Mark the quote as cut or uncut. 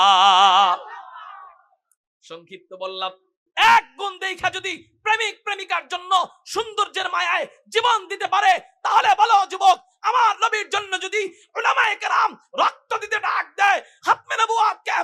cut